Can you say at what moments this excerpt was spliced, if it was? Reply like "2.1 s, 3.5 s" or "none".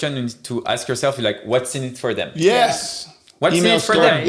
none